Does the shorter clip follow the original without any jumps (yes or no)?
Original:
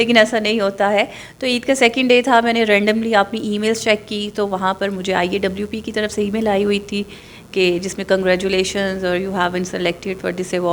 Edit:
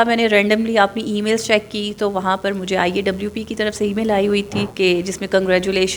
no